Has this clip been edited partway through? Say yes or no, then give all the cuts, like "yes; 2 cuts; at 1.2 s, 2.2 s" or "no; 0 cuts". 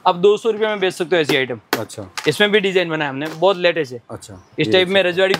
no; 0 cuts